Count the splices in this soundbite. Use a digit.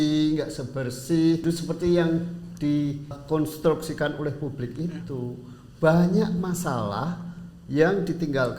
2